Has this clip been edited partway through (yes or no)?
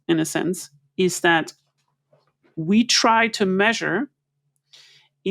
no